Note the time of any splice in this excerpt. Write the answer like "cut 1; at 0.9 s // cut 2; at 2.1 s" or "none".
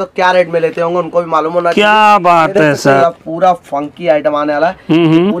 cut 1; at 3.0 s